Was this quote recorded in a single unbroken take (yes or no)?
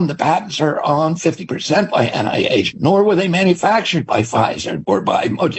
no